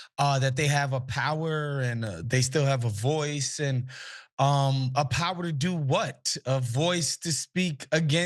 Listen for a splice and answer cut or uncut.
cut